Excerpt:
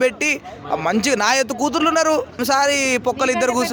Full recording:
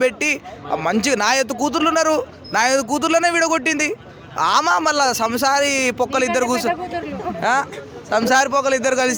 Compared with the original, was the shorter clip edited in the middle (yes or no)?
yes